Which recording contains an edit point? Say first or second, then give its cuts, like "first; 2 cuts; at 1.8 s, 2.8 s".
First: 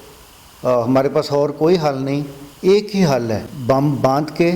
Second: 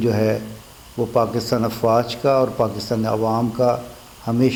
first; 1 cut; at 3.5 s